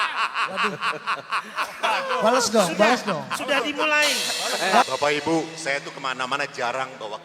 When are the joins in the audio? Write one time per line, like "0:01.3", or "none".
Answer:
0:04.8